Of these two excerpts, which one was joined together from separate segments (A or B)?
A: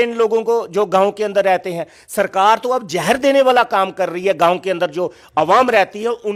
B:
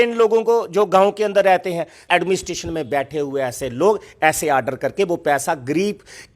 B